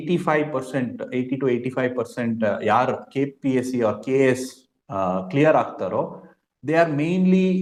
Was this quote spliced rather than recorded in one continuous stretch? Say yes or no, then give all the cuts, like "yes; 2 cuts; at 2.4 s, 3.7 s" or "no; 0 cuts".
no; 0 cuts